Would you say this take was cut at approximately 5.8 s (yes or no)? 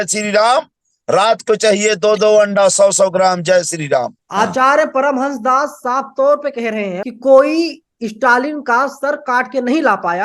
no